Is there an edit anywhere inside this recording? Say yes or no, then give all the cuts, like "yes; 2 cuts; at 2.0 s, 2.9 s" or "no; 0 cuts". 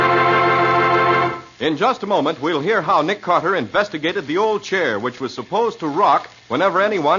yes; 1 cut; at 5.7 s